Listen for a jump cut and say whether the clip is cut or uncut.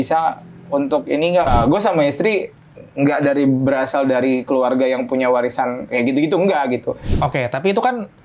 cut